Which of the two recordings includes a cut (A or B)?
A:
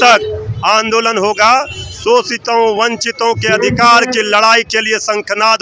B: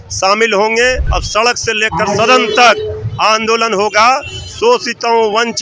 B